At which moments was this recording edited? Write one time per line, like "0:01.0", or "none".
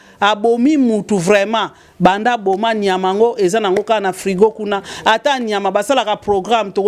none